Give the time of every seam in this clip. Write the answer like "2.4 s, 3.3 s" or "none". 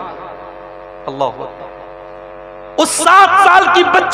none